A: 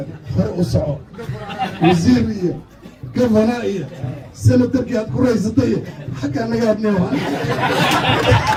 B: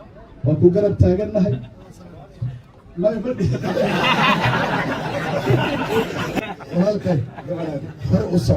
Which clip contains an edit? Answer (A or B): B